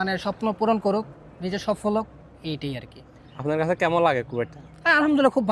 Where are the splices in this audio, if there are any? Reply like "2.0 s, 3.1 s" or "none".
none